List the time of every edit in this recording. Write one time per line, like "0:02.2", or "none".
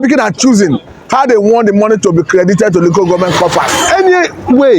0:03.8